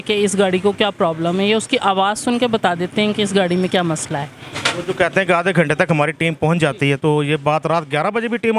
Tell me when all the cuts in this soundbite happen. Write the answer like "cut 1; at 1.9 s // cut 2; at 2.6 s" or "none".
cut 1; at 4.6 s

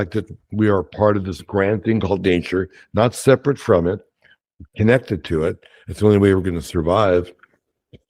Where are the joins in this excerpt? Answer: none

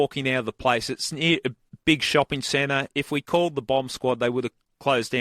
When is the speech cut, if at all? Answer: cut 1; at 1.6 s

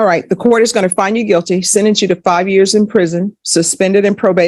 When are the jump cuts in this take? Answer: none

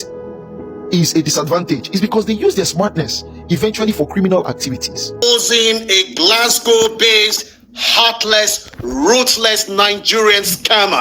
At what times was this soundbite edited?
cut 1; at 5.2 s

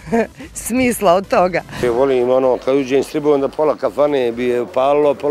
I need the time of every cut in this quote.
cut 1; at 1.8 s

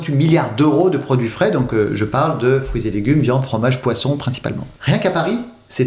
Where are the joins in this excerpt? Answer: cut 1; at 4.7 s

